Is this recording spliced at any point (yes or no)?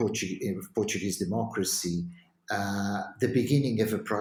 no